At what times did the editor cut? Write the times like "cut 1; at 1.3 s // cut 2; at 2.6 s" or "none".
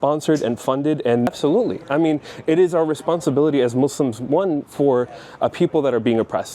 cut 1; at 1.3 s

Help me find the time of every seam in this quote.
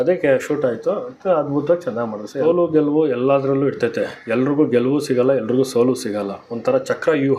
cut 1; at 2.4 s

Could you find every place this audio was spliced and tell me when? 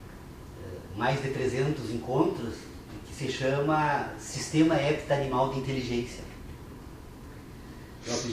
cut 1; at 7.1 s

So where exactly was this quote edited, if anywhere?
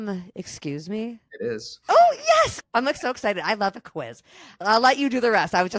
cut 1; at 1.5 s // cut 2; at 2.6 s

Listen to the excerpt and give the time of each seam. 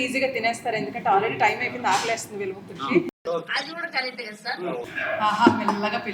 cut 1; at 4.8 s

